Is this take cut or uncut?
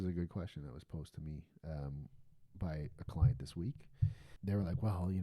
cut